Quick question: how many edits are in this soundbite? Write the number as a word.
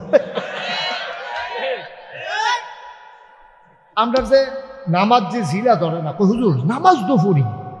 one